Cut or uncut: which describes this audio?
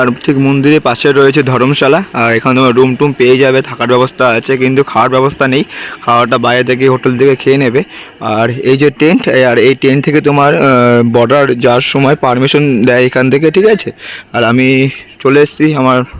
uncut